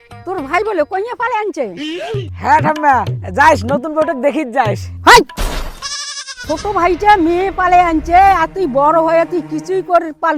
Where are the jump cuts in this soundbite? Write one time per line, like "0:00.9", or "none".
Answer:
none

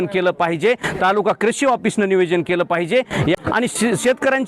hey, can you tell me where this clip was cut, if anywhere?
0:03.4

